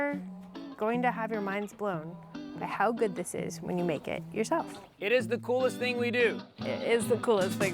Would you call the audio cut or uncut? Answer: cut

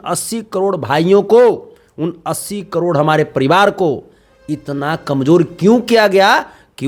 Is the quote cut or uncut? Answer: uncut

